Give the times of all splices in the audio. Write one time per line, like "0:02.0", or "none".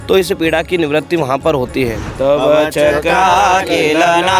0:02.0